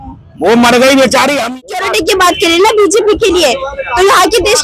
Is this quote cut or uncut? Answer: cut